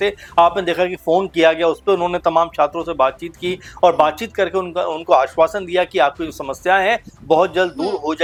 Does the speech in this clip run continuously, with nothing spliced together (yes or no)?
yes